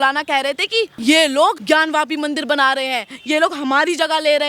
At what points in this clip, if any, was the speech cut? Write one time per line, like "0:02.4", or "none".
0:00.9
0:01.6